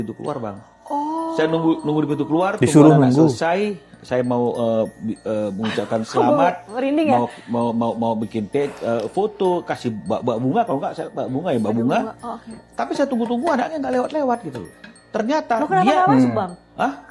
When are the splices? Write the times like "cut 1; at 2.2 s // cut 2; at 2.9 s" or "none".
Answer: none

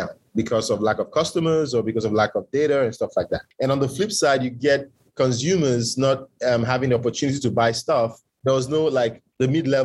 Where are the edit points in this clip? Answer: cut 1; at 8.3 s

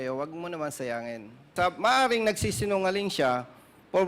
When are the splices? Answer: cut 1; at 1.5 s

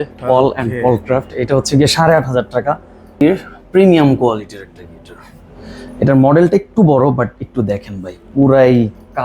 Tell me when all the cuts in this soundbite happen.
cut 1; at 3.2 s

